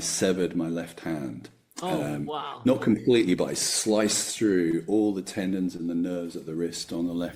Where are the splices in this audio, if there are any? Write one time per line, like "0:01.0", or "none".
none